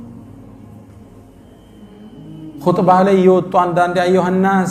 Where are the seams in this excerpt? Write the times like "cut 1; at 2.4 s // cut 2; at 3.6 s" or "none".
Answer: none